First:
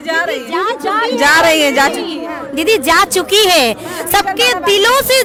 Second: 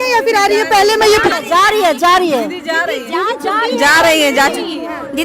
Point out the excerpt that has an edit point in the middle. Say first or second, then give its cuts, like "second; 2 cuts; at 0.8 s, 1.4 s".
second; 1 cut; at 1.3 s